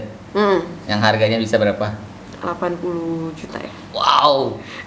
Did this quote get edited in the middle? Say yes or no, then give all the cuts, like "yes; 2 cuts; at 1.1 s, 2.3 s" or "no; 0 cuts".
no; 0 cuts